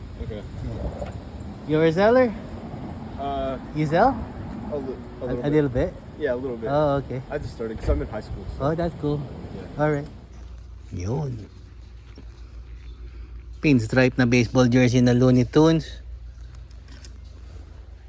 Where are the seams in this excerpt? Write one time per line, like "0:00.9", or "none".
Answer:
0:10.2